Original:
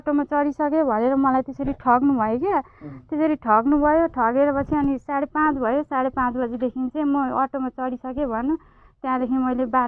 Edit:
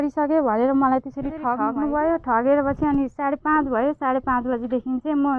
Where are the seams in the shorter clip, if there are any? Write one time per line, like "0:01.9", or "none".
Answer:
0:01.5